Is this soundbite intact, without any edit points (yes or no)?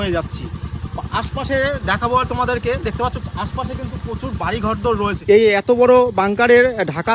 no